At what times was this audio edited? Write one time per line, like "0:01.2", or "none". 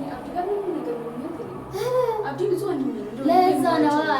none